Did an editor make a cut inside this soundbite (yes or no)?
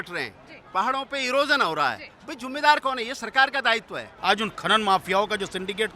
yes